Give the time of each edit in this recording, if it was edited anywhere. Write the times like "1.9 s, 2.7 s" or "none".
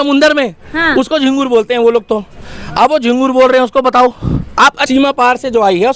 4.8 s